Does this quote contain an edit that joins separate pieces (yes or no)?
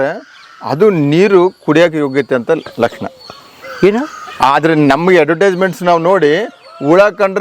no